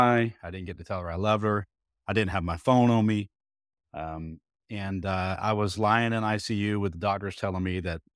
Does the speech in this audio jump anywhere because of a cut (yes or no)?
no